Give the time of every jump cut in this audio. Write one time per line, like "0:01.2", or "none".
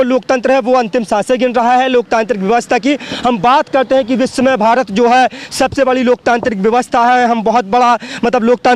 none

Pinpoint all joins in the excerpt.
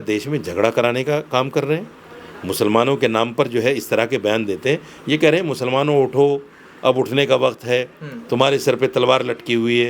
none

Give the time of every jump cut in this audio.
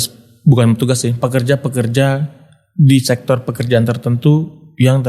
none

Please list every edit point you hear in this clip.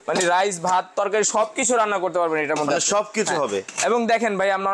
none

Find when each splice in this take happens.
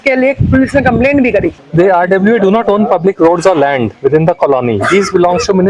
0:01.6

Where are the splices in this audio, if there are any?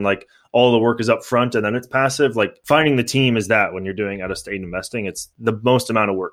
0:02.6

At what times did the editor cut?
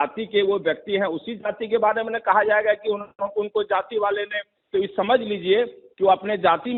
none

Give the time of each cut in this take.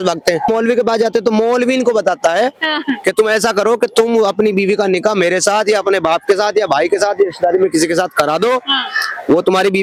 none

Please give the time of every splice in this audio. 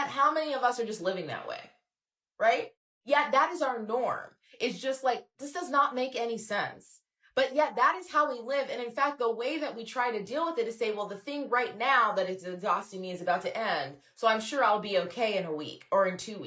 0:05.4

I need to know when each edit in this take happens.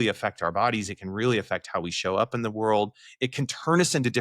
none

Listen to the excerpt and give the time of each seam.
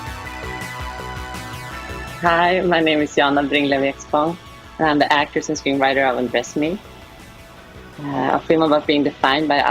0:02.1

